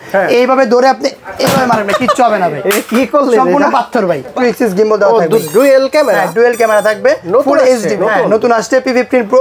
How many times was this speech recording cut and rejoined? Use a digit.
2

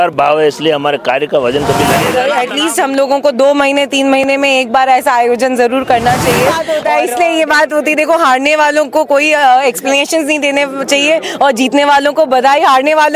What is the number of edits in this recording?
2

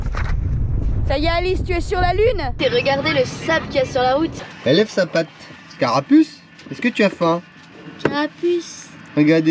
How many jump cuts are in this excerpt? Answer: 2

